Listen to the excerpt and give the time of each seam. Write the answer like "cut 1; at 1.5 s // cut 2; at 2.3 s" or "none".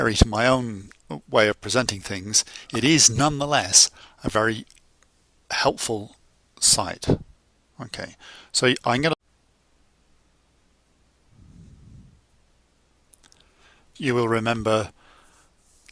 none